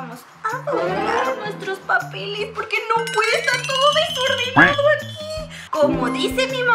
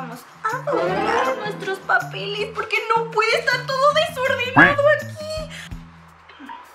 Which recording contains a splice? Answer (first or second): second